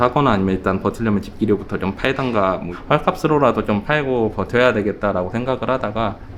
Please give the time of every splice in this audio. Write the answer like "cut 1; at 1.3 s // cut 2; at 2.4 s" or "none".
none